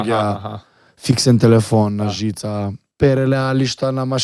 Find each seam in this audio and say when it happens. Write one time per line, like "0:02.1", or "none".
0:02.8